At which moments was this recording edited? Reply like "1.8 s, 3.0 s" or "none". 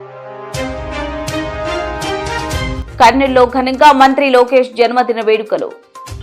1.0 s, 2.8 s